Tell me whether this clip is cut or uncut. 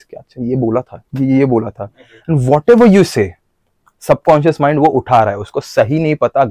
uncut